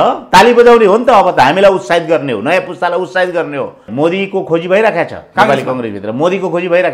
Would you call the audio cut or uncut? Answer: cut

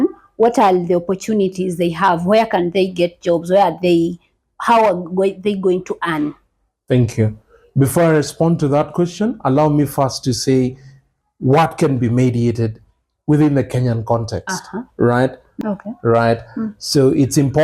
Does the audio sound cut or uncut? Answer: cut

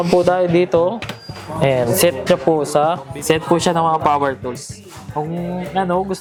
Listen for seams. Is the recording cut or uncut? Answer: uncut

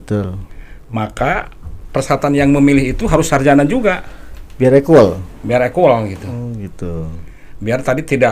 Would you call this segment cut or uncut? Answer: uncut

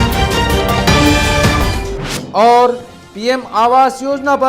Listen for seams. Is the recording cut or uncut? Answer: uncut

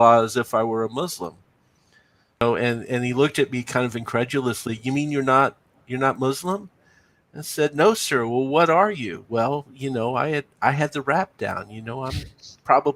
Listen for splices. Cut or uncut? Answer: cut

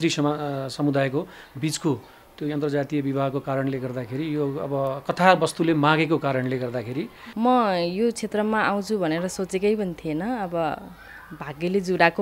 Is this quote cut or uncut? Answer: cut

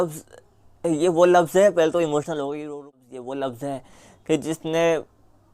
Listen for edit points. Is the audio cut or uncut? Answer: cut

